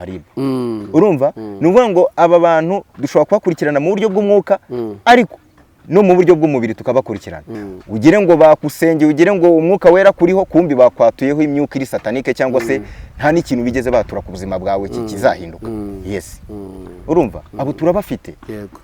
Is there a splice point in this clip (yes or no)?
yes